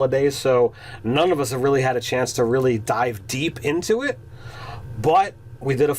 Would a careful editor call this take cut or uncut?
cut